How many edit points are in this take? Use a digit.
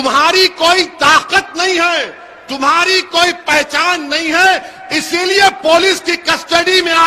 0